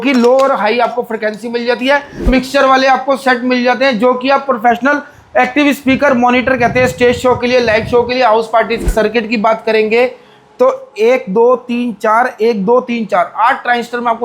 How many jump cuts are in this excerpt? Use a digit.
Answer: 2